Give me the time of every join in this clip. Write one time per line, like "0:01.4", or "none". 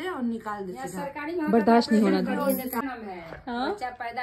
0:02.8